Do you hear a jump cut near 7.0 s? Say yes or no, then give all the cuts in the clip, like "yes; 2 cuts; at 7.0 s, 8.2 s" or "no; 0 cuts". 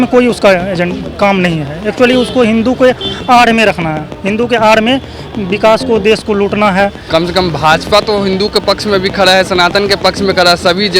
yes; 1 cut; at 7.0 s